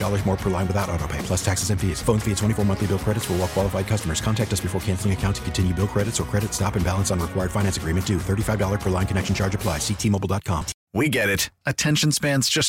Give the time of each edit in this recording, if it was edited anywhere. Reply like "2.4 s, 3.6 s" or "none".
10.7 s